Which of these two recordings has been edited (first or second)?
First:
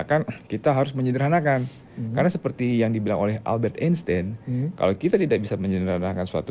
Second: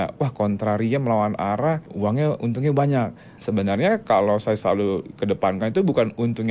second